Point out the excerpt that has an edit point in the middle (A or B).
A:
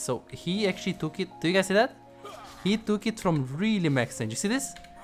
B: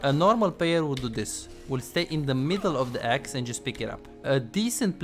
B